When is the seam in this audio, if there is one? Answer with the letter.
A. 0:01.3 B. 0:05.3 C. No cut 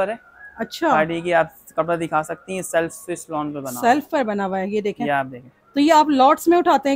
C